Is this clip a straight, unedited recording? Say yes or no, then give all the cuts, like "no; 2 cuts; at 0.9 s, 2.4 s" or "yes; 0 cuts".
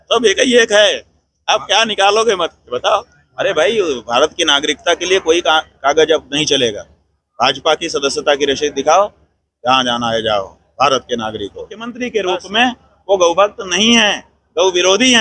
no; 2 cuts; at 3.2 s, 11.9 s